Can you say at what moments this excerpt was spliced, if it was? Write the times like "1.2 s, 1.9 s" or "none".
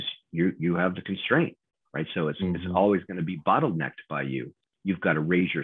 4.6 s

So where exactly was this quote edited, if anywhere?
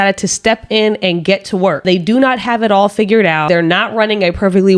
1.8 s, 3.5 s

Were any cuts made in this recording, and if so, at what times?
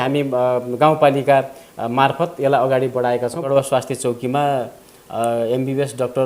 3.4 s

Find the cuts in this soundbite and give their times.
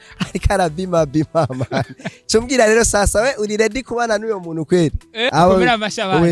5.2 s

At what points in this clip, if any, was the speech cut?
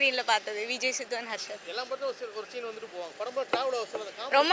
none

